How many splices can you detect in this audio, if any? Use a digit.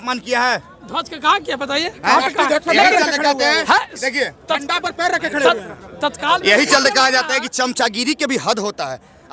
0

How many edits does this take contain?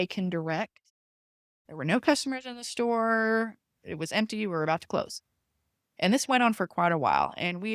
1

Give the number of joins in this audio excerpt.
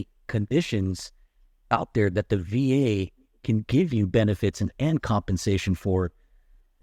0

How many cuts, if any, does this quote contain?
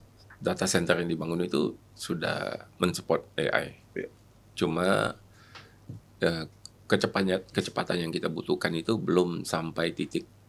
0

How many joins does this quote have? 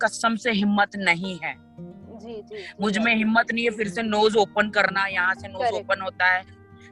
0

